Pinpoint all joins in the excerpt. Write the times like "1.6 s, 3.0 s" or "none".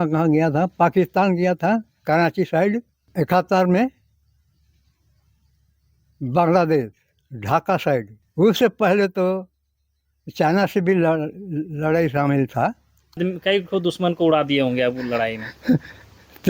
3.1 s, 8.2 s, 13.2 s